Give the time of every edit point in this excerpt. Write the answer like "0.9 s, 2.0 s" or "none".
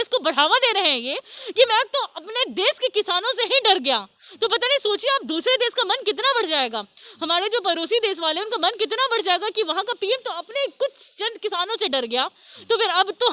none

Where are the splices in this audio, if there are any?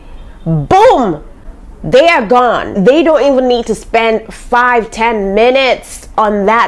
2.7 s

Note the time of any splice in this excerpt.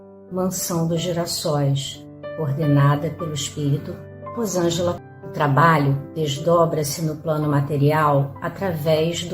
5.0 s

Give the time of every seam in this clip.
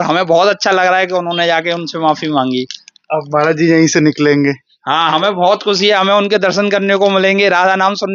none

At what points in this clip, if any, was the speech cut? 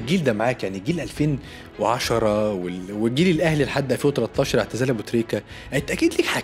none

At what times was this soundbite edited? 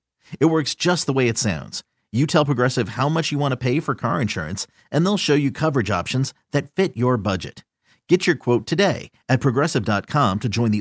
none

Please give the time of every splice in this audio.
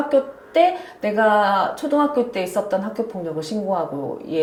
none

